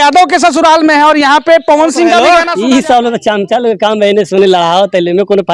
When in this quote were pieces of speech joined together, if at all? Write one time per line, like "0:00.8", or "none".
0:02.2